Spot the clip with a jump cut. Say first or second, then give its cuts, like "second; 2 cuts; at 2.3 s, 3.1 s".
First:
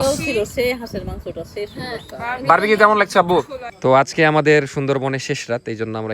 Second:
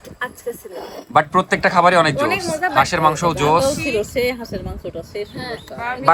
first; 1 cut; at 3.6 s